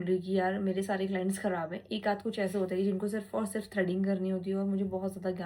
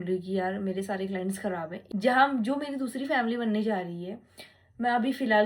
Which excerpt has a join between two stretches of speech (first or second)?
second